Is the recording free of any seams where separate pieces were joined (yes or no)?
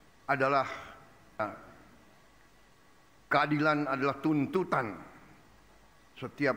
no